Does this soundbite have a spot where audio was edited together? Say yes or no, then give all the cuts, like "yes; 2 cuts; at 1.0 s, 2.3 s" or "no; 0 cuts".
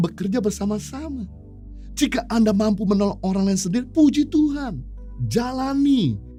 no; 0 cuts